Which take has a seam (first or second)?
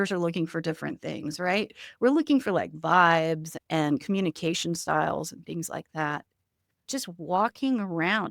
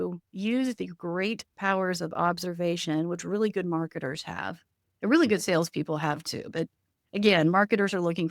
first